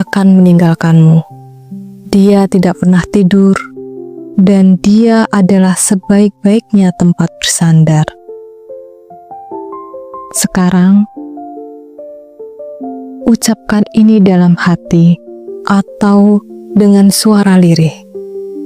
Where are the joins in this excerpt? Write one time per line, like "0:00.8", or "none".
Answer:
0:08.5
0:10.4